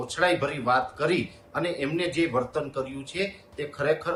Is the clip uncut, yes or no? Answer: yes